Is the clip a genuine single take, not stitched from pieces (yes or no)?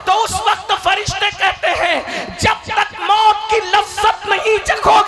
yes